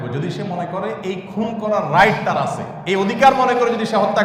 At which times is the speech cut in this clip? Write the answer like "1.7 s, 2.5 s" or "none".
none